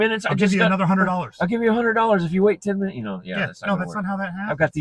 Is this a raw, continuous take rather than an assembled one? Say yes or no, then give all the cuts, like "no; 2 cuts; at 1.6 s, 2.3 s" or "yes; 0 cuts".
yes; 0 cuts